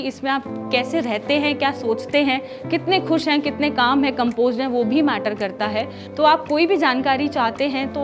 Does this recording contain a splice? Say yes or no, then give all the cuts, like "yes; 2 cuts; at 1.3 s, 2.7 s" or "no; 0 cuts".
yes; 1 cut; at 6.0 s